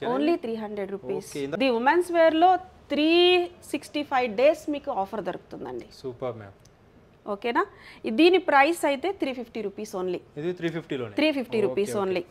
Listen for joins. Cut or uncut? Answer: cut